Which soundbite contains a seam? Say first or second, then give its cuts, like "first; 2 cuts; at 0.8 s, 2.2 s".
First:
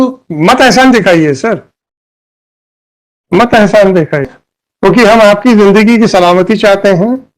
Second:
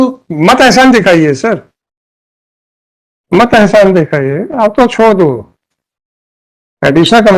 first; 1 cut; at 4.4 s